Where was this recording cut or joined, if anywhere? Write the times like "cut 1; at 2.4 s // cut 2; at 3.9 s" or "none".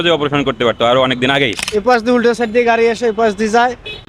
cut 1; at 1.6 s